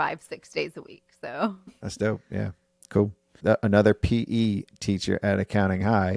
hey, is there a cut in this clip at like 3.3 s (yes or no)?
yes